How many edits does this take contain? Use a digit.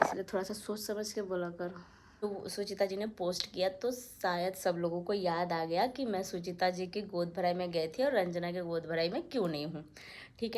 1